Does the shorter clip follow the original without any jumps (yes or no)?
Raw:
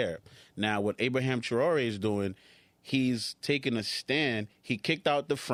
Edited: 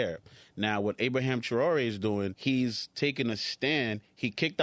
no